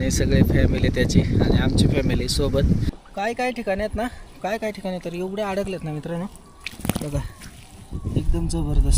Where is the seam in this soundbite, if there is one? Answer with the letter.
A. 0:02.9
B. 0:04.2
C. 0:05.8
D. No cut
A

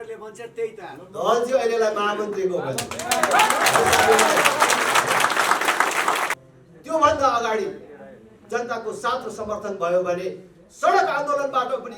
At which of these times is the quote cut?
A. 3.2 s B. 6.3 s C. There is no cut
B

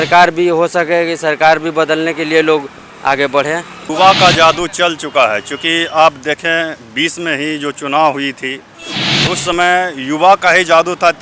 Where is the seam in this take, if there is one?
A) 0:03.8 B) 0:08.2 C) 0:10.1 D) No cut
A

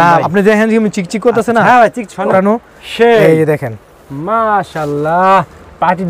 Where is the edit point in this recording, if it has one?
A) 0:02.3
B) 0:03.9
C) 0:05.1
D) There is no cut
A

